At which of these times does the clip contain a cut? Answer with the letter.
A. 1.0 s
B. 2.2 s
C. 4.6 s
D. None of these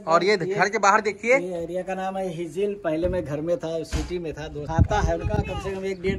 C